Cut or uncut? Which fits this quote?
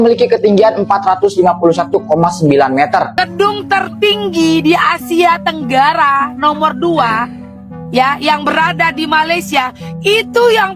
cut